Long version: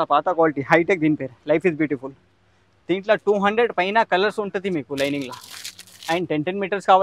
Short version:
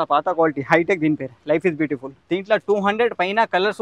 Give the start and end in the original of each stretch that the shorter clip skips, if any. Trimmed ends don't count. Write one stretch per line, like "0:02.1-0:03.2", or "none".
0:02.1-0:02.7